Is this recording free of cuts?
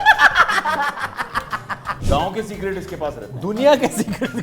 no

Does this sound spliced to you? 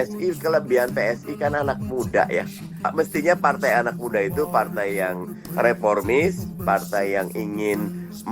yes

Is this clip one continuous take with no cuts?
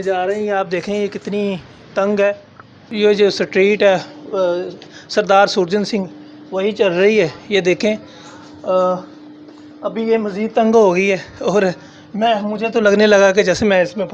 no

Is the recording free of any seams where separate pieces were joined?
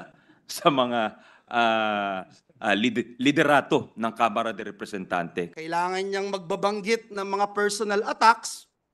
no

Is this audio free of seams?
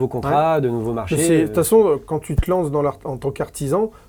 yes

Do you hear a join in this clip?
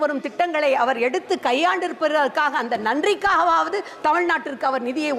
no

